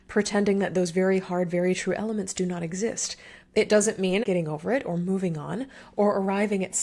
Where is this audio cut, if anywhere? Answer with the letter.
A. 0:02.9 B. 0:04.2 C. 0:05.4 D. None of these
B